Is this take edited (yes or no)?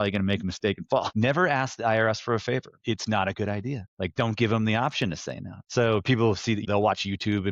yes